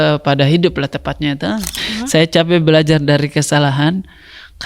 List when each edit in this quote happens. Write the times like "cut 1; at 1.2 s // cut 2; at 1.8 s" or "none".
cut 1; at 1.8 s